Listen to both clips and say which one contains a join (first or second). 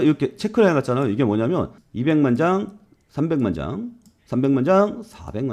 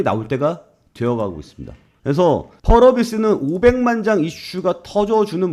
first